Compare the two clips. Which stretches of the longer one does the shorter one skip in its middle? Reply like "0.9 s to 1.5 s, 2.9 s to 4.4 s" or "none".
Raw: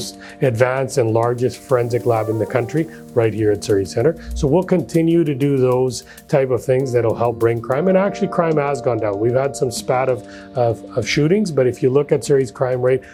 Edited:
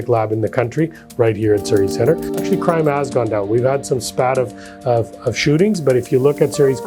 4.4 s to 8.1 s